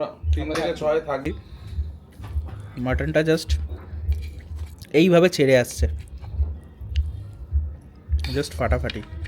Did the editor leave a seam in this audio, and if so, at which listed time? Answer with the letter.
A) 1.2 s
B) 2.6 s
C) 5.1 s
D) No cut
A